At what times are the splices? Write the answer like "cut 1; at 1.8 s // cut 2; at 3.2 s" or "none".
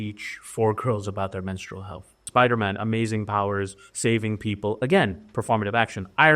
cut 1; at 2.2 s